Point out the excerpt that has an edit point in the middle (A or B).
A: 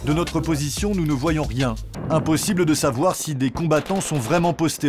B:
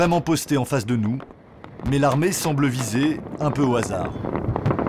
A